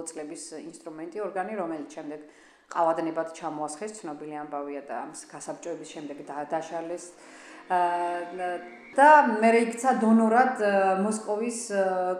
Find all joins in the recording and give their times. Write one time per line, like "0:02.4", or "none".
0:08.9